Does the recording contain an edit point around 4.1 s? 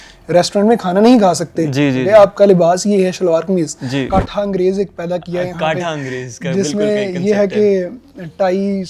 yes; 1 cut; at 4.1 s

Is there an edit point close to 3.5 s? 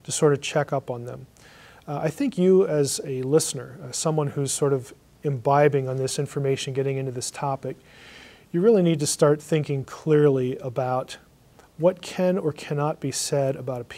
yes; 1 cut; at 3.5 s

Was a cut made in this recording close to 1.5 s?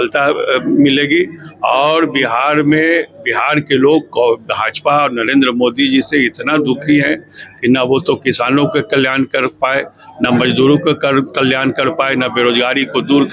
no; 0 cuts

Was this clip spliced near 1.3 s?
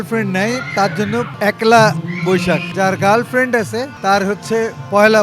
yes; 3 cuts; at 1.3 s, 2.7 s, 3.9 s

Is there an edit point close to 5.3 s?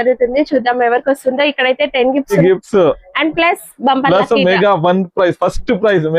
no; 1 cut; at 2.4 s

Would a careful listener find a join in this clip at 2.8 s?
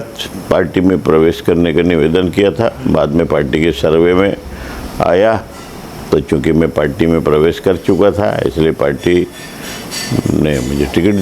no; 0 cuts

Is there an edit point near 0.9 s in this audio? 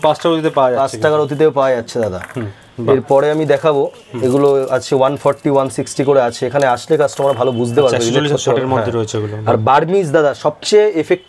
no; 0 cuts

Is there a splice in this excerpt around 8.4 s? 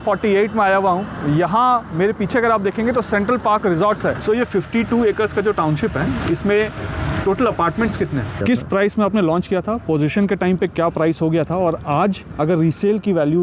yes; 2 cuts; at 4.2 s, 8.4 s

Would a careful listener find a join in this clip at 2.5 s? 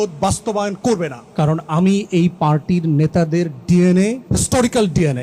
no; 2 cuts; at 1.2 s, 4.2 s

